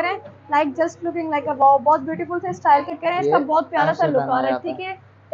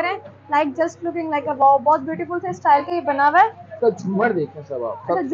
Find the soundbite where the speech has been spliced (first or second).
first